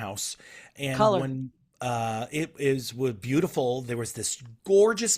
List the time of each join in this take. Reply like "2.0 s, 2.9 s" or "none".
none